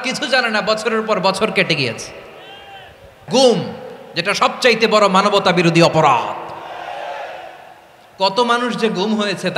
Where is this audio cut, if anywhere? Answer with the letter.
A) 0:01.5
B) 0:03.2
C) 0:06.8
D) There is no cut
B